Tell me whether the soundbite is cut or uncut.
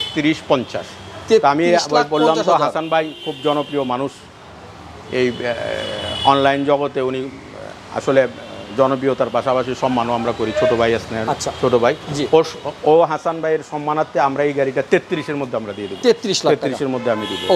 uncut